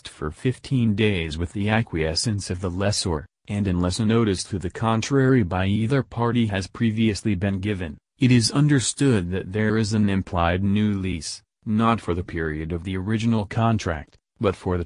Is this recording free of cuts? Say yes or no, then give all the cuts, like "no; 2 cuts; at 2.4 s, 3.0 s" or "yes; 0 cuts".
yes; 0 cuts